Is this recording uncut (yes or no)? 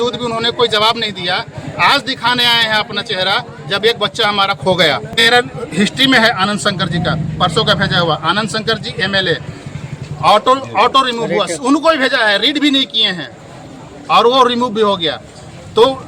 no